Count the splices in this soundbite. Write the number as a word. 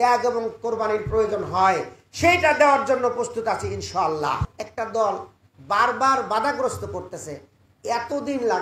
one